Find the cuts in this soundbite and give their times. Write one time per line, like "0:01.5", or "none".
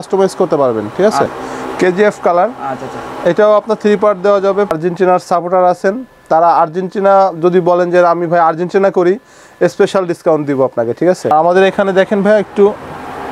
0:01.4
0:04.7
0:11.3